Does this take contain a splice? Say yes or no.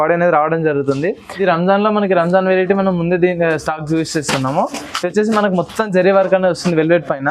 yes